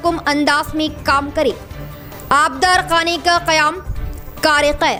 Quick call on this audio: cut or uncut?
uncut